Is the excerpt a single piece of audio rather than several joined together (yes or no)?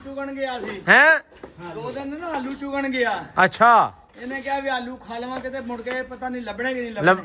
yes